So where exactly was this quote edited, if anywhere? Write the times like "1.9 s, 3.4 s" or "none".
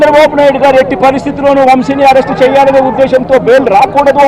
none